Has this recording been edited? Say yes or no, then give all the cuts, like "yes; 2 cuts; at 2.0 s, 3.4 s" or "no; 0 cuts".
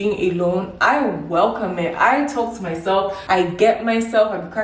yes; 1 cut; at 3.2 s